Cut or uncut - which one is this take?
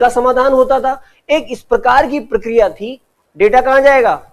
cut